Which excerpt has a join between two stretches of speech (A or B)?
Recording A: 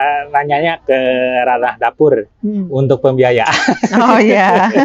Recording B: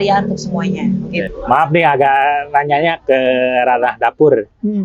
B